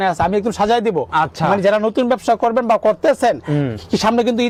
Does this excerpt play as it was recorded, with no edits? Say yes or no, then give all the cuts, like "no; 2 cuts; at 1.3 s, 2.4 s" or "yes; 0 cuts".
yes; 0 cuts